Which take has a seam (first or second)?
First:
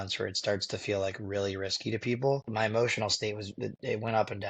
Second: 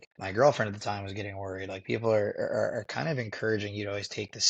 first